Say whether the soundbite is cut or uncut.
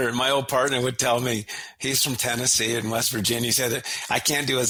uncut